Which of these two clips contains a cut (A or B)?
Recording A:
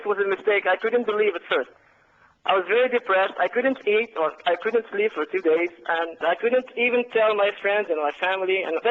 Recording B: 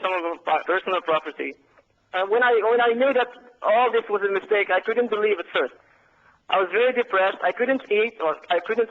A